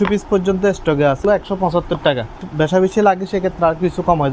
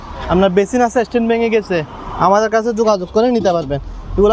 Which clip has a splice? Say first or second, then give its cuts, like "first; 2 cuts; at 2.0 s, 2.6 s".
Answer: first; 2 cuts; at 1.2 s, 2.4 s